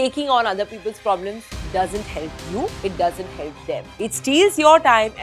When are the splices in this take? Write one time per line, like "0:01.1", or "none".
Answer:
none